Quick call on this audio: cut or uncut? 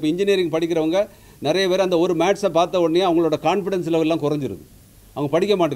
uncut